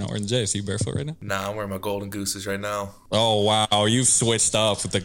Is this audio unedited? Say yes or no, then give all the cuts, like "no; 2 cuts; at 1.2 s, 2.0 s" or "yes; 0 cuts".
no; 2 cuts; at 1.2 s, 3.0 s